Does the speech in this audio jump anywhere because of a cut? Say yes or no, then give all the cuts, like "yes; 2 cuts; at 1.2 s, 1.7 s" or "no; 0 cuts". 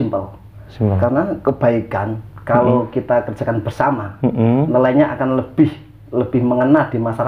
no; 0 cuts